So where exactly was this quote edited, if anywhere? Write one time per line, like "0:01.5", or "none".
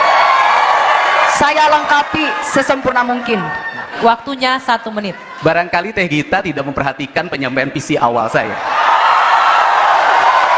0:03.9

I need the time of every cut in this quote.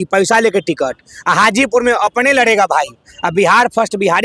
none

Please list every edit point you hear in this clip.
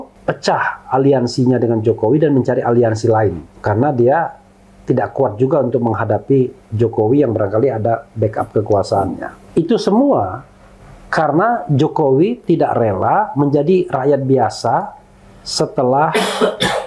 0:03.5
0:09.4

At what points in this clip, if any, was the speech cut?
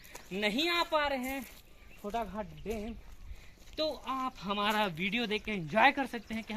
none

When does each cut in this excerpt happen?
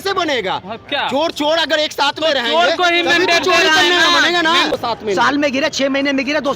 0:04.7

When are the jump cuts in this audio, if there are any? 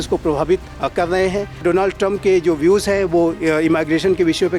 0:01.6

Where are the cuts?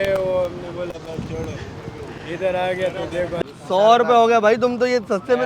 0:03.4

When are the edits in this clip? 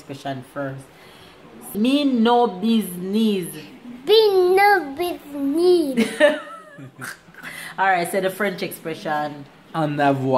0:01.6

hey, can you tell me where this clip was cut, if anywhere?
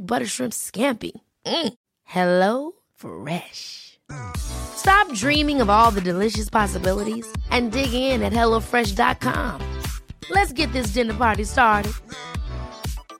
none

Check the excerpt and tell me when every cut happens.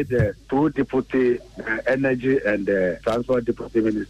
0:03.0

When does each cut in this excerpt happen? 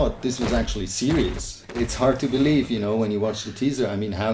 0:01.8

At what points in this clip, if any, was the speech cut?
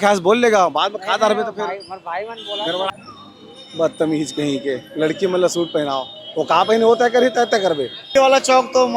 0:02.9
0:08.1

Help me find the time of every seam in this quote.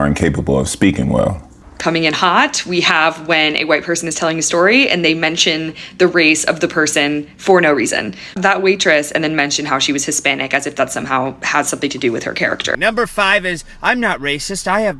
0:01.8
0:12.7

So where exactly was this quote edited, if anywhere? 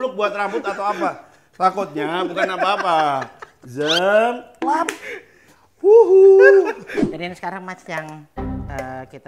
0:06.9

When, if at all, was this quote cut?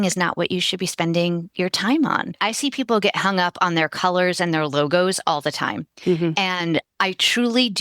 0:02.2

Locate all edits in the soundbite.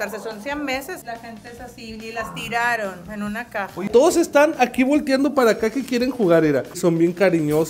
0:01.0
0:03.9
0:06.8

